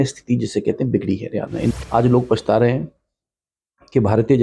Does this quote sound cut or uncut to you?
cut